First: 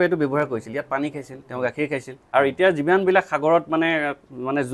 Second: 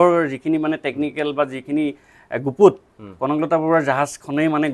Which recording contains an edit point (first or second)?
first